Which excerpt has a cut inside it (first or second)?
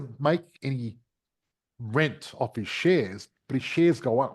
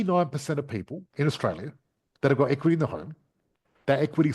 second